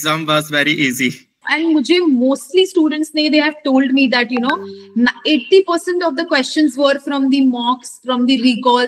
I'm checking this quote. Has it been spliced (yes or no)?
yes